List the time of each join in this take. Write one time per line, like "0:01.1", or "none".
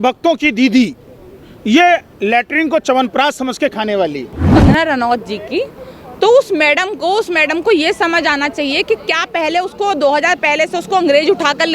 0:04.5